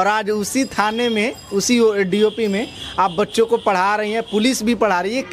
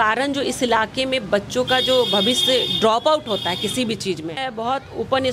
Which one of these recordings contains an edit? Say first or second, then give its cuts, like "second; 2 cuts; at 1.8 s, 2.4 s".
second; 1 cut; at 4.4 s